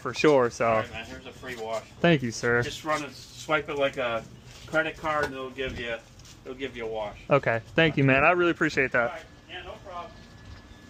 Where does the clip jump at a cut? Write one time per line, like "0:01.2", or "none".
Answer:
none